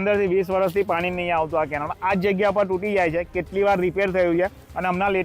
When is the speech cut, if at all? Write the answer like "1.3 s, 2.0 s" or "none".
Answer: none